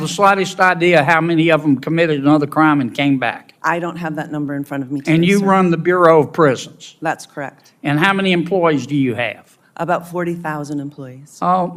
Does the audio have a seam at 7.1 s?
no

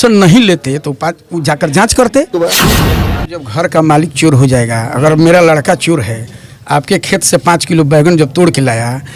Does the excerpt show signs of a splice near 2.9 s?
yes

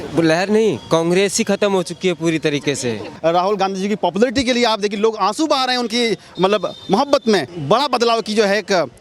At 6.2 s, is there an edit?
no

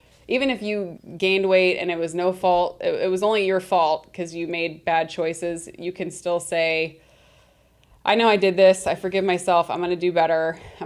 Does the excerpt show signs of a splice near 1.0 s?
yes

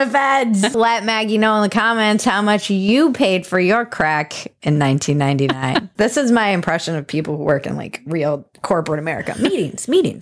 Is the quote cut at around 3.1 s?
no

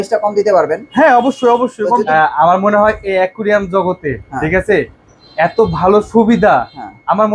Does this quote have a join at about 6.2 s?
no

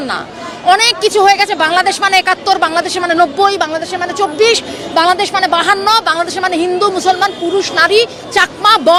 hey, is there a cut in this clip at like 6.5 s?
no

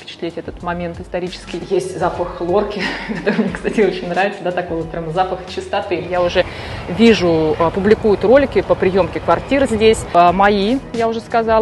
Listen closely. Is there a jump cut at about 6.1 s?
yes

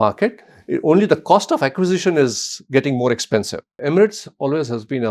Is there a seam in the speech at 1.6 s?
no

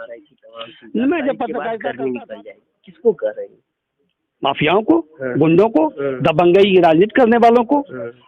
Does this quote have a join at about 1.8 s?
yes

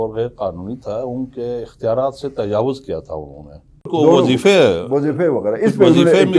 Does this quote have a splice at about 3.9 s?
yes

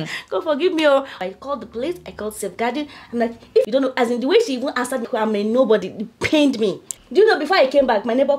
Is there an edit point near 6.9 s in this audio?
yes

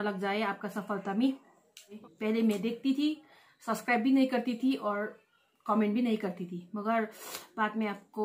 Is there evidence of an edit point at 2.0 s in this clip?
yes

